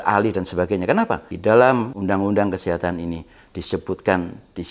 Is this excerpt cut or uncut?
cut